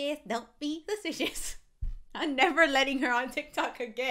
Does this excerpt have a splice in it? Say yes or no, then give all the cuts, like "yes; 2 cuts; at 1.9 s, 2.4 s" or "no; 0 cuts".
no; 0 cuts